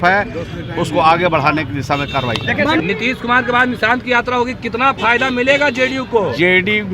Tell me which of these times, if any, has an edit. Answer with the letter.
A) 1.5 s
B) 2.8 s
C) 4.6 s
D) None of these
B